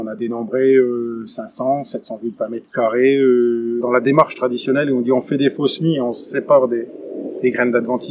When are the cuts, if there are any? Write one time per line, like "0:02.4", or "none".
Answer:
0:03.8